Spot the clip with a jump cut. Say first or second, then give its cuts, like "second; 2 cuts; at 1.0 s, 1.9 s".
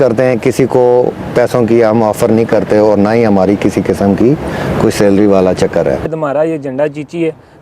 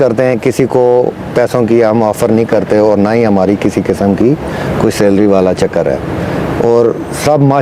first; 1 cut; at 6.1 s